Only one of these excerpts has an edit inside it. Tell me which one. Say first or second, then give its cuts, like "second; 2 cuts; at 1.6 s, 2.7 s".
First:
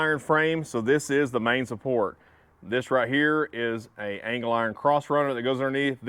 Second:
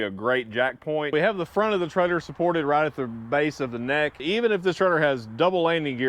second; 2 cuts; at 1.1 s, 4.2 s